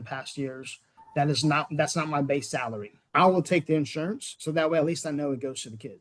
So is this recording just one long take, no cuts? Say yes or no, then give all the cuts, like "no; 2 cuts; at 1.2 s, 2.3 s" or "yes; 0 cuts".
no; 1 cut; at 3.0 s